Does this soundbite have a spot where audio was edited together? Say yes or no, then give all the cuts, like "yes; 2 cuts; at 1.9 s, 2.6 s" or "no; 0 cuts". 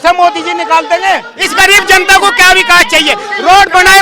yes; 1 cut; at 1.4 s